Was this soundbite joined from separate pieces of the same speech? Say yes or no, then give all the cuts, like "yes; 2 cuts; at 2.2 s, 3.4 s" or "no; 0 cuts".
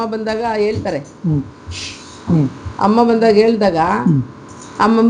no; 0 cuts